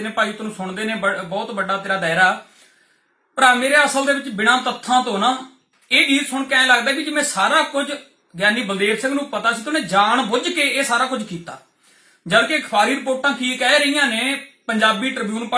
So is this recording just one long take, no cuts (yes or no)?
yes